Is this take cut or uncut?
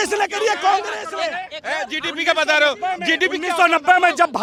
uncut